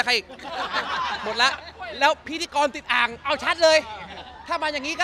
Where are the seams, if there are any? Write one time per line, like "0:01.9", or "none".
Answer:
none